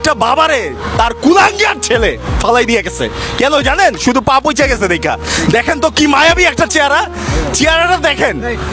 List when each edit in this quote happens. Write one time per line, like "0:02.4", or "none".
none

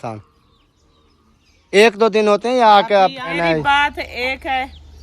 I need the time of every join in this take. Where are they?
0:03.4

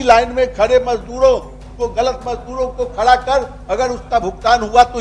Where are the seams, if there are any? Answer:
none

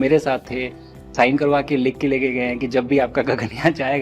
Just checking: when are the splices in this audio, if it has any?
0:01.1

